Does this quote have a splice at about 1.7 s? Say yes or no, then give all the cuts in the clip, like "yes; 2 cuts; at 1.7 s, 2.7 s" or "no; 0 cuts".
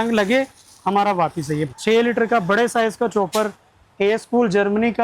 yes; 1 cut; at 1.7 s